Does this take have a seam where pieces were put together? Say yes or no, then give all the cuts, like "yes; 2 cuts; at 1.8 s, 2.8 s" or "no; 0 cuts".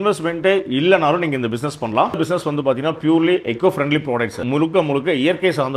yes; 2 cuts; at 2.2 s, 4.4 s